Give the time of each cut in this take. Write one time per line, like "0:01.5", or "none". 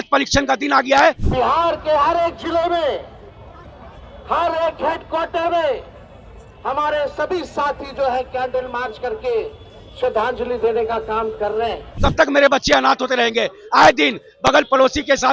0:01.2
0:11.9